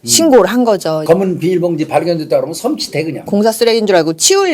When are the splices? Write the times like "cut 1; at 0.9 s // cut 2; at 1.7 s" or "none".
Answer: cut 1; at 1.0 s // cut 2; at 3.2 s